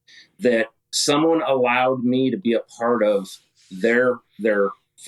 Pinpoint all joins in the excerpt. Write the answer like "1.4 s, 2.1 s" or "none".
none